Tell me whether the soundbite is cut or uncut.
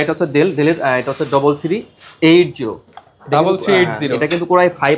uncut